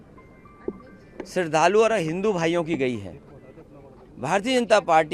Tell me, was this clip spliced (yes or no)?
no